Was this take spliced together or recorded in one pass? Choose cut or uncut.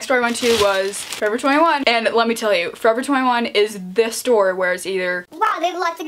cut